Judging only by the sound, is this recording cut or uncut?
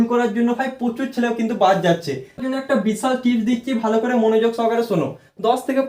cut